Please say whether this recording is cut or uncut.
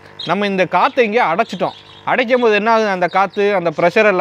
uncut